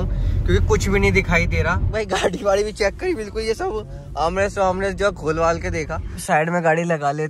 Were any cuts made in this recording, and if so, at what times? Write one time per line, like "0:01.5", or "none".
0:01.9
0:06.2